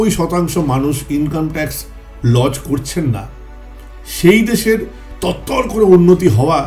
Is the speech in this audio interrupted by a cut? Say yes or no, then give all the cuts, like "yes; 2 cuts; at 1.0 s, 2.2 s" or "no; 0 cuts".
no; 0 cuts